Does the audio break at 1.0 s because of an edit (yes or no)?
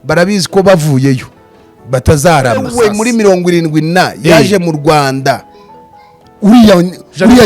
no